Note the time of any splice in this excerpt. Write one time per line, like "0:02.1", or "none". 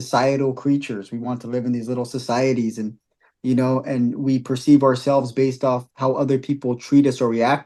none